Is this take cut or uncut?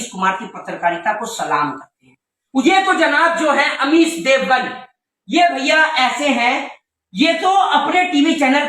cut